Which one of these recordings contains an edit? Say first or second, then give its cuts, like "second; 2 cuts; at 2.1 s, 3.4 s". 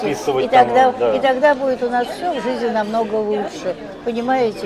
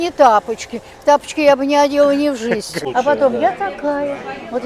second; 1 cut; at 2.8 s